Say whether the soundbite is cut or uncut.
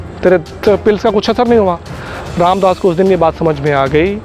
uncut